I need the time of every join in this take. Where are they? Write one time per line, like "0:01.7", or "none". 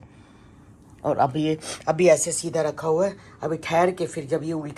none